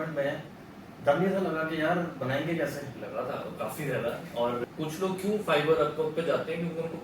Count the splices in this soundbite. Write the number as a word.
one